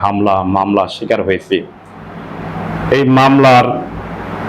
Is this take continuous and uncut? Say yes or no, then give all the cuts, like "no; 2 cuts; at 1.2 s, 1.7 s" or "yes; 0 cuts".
yes; 0 cuts